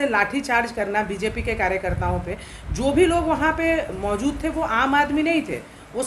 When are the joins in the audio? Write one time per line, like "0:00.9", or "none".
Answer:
none